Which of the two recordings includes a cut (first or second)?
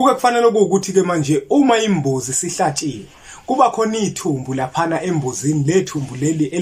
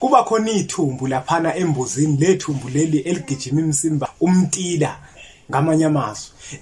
second